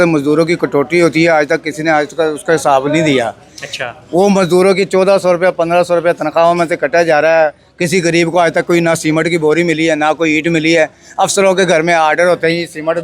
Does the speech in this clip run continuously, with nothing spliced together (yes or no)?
yes